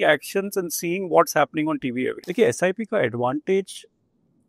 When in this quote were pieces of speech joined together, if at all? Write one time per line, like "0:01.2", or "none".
0:02.2